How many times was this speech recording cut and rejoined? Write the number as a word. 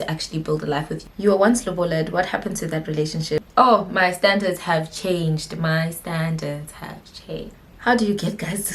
three